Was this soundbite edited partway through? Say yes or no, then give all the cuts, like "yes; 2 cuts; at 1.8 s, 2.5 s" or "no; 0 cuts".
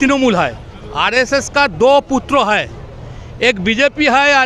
no; 0 cuts